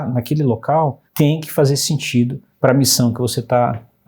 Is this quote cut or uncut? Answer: cut